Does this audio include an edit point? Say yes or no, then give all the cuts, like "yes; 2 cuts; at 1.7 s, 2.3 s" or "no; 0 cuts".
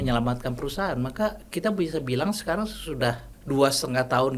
yes; 1 cut; at 3.3 s